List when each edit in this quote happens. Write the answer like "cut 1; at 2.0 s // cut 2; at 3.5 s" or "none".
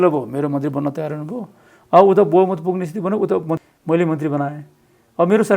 cut 1; at 3.6 s